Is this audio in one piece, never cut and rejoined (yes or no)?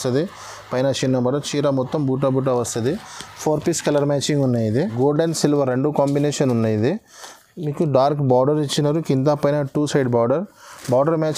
no